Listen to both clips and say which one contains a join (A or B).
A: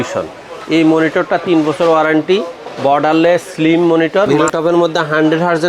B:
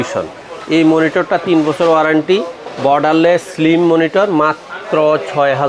A